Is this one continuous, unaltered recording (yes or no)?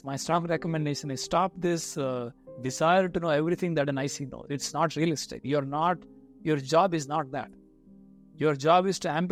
yes